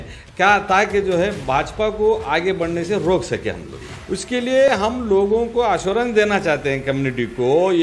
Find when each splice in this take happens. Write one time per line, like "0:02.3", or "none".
0:03.9